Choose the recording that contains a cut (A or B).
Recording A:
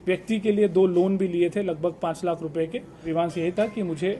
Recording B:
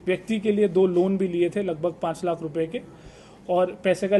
A